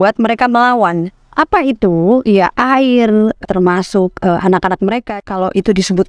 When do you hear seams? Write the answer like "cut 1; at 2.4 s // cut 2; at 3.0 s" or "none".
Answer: cut 1; at 1.2 s // cut 2; at 3.4 s // cut 3; at 5.1 s

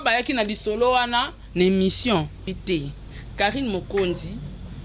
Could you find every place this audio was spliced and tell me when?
cut 1; at 2.5 s

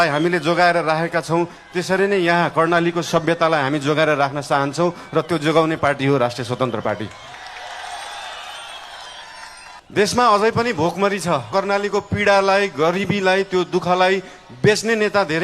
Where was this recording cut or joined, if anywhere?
cut 1; at 9.8 s // cut 2; at 11.5 s

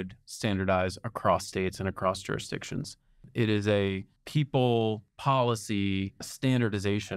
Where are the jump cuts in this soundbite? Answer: cut 1; at 3.3 s // cut 2; at 4.1 s // cut 3; at 5.1 s // cut 4; at 6.3 s

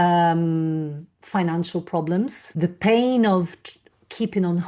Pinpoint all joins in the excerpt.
cut 1; at 2.4 s

